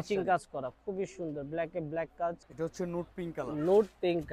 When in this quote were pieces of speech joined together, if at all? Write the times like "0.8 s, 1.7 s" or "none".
2.5 s